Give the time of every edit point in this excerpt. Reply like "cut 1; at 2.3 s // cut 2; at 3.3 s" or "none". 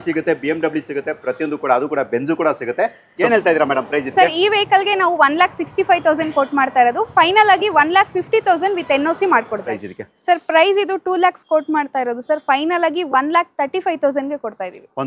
cut 1; at 3.1 s // cut 2; at 9.8 s